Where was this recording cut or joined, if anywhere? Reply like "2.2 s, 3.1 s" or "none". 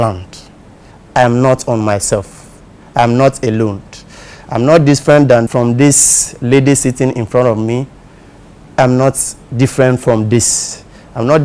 5.5 s